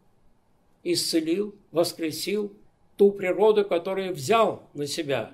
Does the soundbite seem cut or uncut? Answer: uncut